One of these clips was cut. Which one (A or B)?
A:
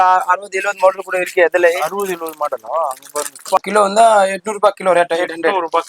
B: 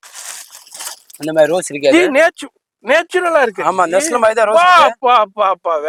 A